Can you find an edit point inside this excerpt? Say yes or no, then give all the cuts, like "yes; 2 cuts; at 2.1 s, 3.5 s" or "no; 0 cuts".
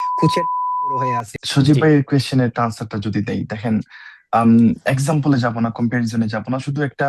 no; 0 cuts